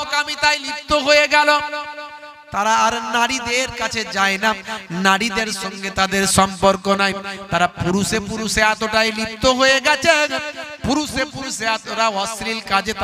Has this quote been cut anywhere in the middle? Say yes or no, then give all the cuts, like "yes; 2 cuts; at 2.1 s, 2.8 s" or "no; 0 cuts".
no; 0 cuts